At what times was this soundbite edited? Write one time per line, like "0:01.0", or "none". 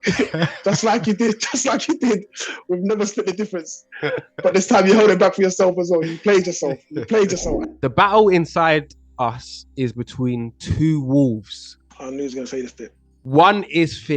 0:07.5